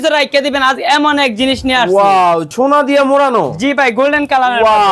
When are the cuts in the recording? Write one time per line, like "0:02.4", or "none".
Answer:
0:02.5